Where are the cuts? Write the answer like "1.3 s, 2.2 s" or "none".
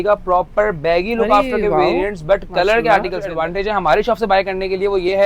3.3 s